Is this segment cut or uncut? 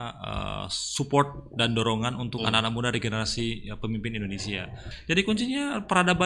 cut